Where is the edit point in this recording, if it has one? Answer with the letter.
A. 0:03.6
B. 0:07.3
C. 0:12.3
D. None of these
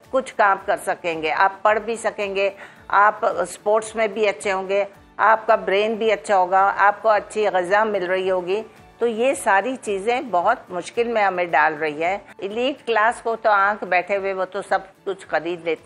C